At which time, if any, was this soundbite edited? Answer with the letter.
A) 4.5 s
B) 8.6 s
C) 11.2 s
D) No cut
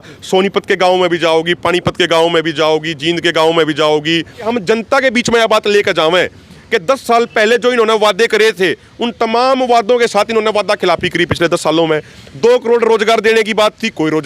A